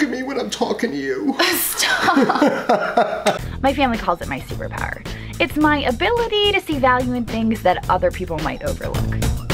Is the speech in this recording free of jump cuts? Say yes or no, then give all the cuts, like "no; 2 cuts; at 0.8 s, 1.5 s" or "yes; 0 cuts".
no; 1 cut; at 3.4 s